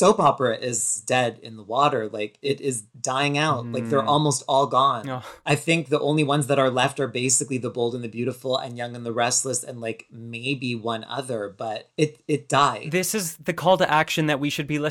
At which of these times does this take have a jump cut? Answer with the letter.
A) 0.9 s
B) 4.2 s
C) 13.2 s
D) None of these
A